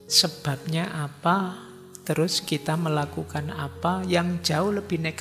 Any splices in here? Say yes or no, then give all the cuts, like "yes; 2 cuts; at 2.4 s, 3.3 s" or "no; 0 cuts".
no; 0 cuts